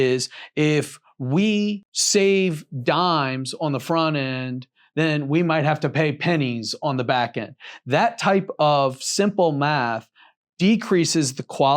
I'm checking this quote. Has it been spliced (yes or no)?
yes